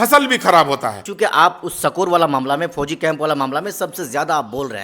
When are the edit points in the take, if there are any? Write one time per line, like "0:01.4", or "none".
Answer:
0:01.0